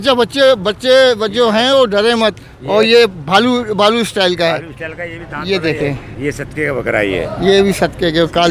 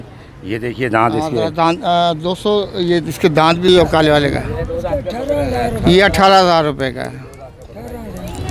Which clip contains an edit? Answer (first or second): second